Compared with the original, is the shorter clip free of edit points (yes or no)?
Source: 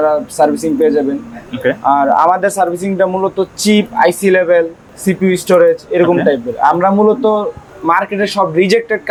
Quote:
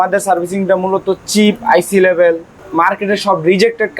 no